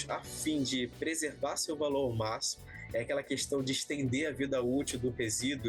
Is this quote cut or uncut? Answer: uncut